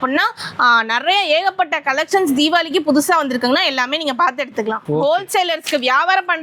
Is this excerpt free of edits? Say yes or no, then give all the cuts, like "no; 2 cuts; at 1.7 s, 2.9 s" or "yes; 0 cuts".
no; 1 cut; at 4.8 s